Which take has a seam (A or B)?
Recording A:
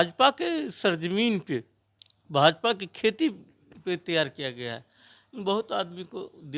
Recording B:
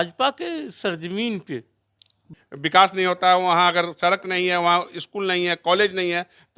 B